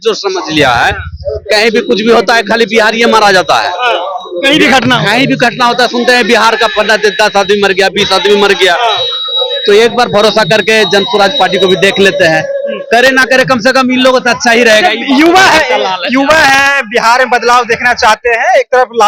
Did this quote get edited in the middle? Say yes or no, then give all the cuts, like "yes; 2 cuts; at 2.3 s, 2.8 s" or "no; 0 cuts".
no; 0 cuts